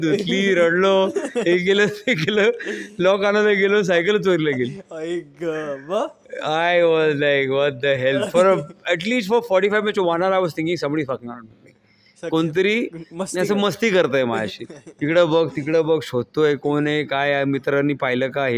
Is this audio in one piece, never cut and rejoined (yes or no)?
yes